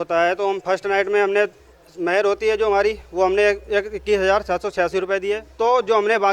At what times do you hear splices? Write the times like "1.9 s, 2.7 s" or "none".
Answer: 5.4 s